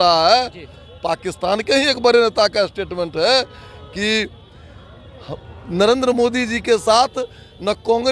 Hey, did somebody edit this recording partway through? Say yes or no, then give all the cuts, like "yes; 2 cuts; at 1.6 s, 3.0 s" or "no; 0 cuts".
no; 0 cuts